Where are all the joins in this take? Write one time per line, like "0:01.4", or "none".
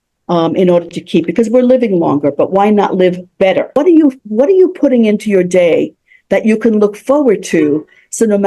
0:03.8